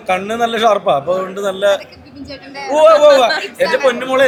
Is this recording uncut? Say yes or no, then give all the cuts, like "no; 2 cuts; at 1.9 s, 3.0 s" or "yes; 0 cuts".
yes; 0 cuts